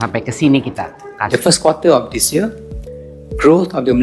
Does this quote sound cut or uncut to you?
cut